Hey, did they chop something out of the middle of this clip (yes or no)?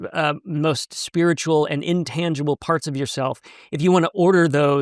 no